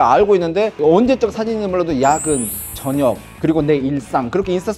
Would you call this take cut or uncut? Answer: uncut